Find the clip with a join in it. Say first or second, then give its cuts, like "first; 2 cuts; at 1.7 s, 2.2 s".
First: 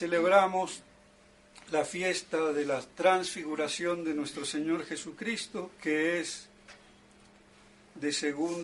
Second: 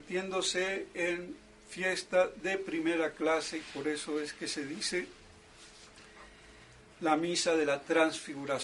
second; 1 cut; at 4.9 s